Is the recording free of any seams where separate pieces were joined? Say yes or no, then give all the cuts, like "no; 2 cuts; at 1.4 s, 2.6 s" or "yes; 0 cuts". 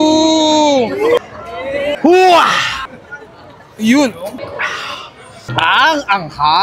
no; 1 cut; at 1.2 s